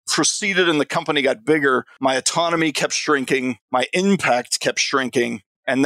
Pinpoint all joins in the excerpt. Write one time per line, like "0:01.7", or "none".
0:01.9
0:03.6